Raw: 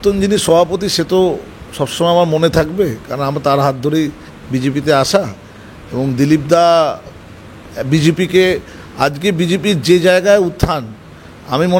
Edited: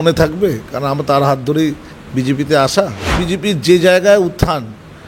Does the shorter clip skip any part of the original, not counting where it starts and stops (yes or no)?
yes